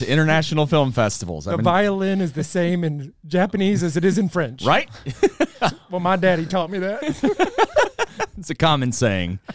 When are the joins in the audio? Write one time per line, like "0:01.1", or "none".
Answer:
none

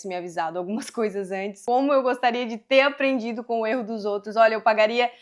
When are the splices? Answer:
0:01.5

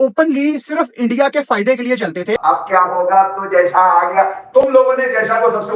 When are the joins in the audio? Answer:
0:02.4

